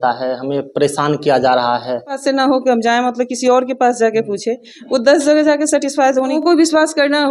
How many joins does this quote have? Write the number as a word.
two